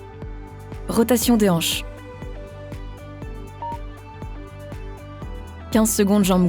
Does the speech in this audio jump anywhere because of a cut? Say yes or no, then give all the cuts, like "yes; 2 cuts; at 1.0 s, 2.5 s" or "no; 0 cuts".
yes; 3 cuts; at 0.9 s, 1.6 s, 5.6 s